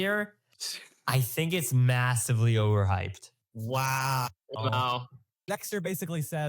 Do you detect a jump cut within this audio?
yes; 1 cut; at 5.4 s

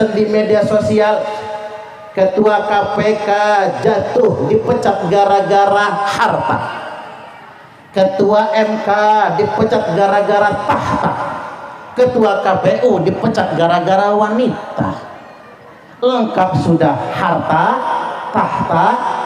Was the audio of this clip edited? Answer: no; 0 cuts

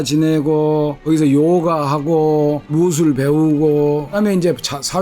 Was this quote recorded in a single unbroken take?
no; 3 cuts; at 1.0 s, 2.7 s, 4.2 s

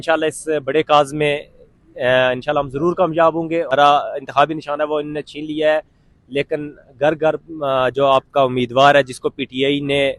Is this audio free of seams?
no; 1 cut; at 3.7 s

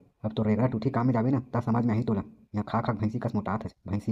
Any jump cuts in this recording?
no; 0 cuts

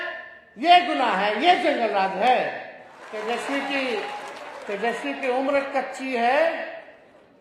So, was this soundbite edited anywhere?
yes; 1 cut; at 3.1 s

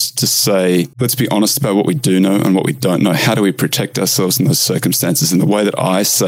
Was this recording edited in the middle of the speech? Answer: yes; 1 cut; at 0.9 s

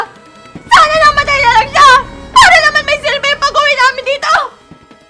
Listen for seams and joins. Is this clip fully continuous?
yes; 0 cuts

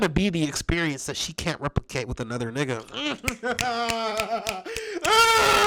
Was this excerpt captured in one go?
yes; 0 cuts

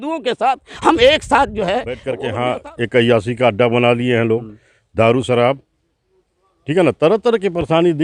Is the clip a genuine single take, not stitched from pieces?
no; 1 cut; at 2.1 s

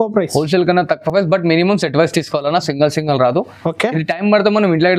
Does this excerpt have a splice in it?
no; 0 cuts

